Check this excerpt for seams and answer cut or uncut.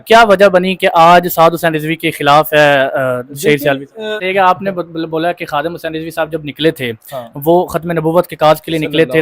cut